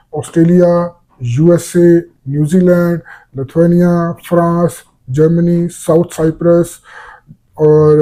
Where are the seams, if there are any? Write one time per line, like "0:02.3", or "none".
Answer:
none